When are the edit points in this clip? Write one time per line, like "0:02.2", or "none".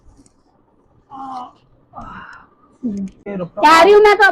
0:03.2